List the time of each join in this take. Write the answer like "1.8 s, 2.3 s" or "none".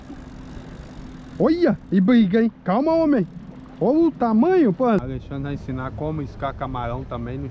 5.0 s